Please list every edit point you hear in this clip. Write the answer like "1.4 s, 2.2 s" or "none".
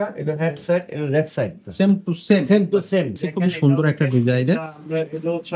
3.2 s